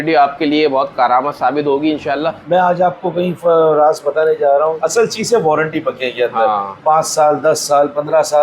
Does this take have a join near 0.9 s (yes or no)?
yes